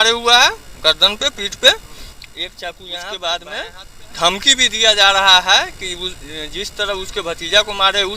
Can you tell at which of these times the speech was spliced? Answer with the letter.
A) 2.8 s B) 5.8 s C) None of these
A